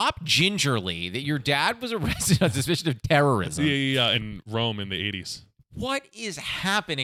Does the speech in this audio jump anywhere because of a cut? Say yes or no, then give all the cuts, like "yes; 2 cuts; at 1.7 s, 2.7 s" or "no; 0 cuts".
yes; 1 cut; at 4.2 s